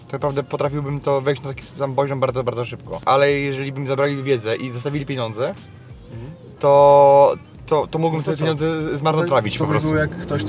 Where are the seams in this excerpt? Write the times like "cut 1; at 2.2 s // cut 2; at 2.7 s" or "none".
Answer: cut 1; at 3.0 s